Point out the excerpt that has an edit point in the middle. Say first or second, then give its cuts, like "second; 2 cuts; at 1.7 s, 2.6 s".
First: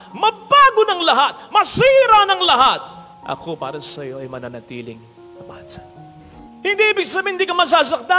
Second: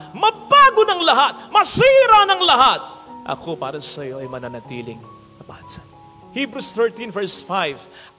first; 1 cut; at 6.2 s